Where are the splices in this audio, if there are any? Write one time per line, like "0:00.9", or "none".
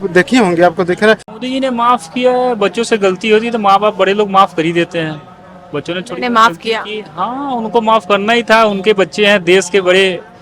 0:01.3